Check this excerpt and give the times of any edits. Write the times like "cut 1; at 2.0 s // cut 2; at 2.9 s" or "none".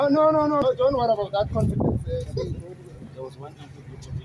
none